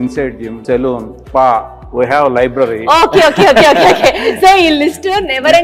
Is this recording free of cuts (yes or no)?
yes